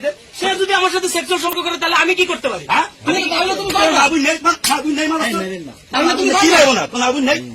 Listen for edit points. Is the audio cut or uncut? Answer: cut